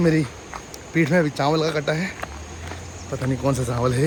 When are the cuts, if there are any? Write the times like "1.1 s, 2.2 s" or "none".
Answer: none

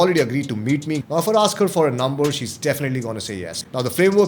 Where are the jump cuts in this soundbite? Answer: 1.0 s, 3.5 s

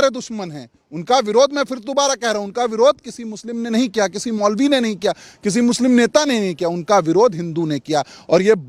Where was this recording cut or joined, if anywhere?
none

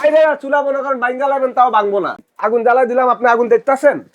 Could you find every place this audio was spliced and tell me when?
2.2 s

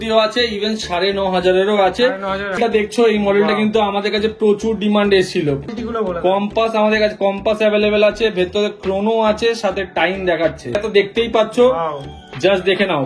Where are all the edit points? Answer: 2.6 s, 5.7 s, 10.8 s

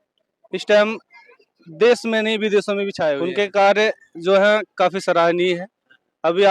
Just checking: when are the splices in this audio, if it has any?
none

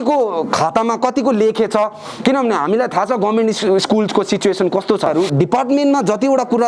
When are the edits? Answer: 5.1 s

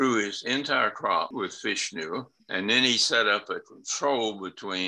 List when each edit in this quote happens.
1.3 s, 2.4 s

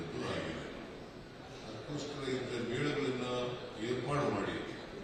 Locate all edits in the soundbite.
none

